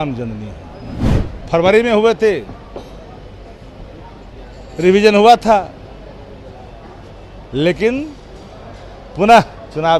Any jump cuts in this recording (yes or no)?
yes